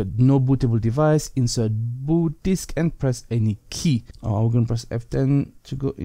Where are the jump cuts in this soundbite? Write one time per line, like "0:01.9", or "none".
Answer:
0:04.1